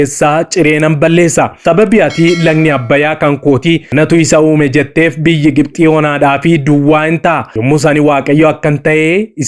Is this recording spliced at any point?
yes; 3 cuts; at 1.6 s, 3.9 s, 7.5 s

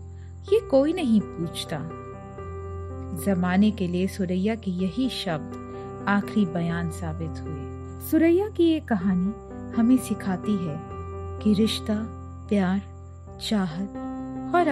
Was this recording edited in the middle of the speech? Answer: yes; 1 cut; at 8.0 s

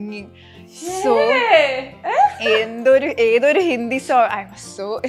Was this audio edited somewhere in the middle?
no; 0 cuts

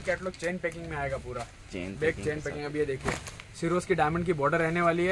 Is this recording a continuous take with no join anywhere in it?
yes; 0 cuts

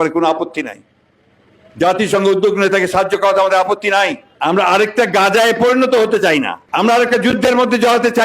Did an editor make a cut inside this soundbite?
yes; 2 cuts; at 4.3 s, 6.6 s

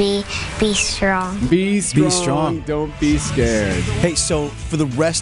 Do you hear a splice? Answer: no; 0 cuts

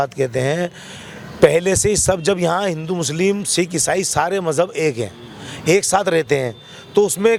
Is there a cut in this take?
no; 0 cuts

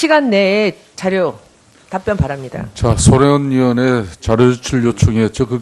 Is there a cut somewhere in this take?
yes; 1 cut; at 4.6 s

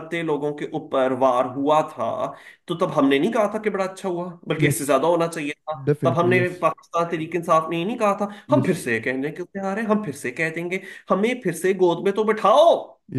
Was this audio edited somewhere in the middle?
no; 0 cuts

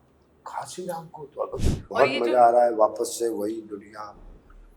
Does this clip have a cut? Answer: yes; 1 cut; at 1.6 s

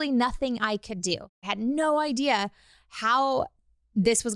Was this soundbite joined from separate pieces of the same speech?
yes; 1 cut; at 1.3 s

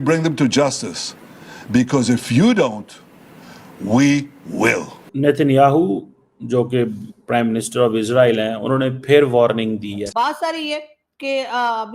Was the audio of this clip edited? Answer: yes; 2 cuts; at 5.0 s, 10.0 s

